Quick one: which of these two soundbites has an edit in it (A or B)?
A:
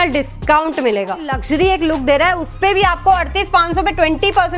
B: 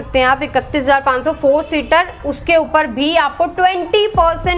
A